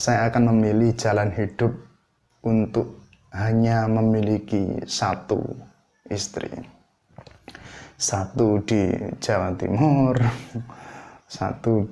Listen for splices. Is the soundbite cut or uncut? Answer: uncut